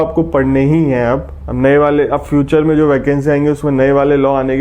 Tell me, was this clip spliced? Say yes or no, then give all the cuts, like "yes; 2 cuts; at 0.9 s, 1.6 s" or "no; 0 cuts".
no; 0 cuts